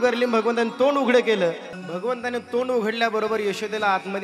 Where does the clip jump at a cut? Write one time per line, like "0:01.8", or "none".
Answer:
none